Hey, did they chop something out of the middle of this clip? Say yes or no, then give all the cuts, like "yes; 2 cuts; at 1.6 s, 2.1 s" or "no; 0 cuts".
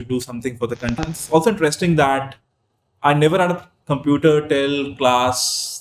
yes; 1 cut; at 1.0 s